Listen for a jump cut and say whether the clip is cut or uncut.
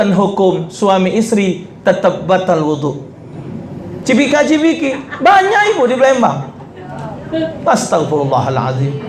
cut